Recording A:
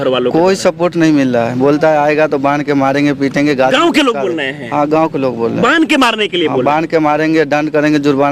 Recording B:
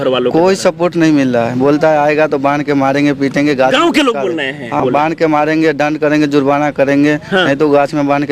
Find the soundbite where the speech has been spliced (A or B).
B